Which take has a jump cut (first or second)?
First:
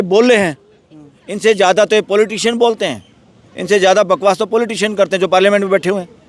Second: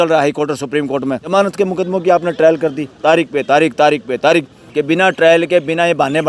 second